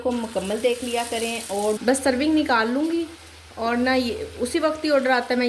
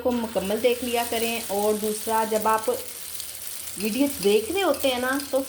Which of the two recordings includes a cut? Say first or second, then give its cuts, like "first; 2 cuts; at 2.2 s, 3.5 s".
first; 1 cut; at 1.8 s